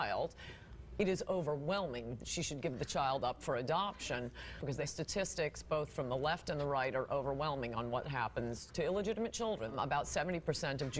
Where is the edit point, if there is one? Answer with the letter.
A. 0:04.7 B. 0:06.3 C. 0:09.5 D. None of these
A